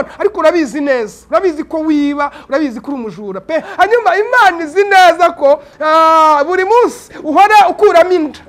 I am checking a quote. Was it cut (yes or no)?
yes